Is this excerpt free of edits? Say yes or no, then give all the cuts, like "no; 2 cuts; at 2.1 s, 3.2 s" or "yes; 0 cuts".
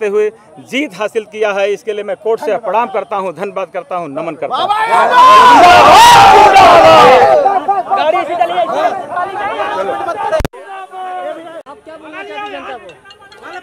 no; 1 cut; at 11.7 s